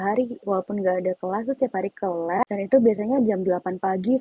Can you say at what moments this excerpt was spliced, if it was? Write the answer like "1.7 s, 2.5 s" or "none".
2.4 s